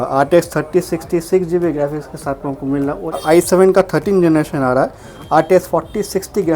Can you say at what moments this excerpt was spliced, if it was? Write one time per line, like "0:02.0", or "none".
0:03.2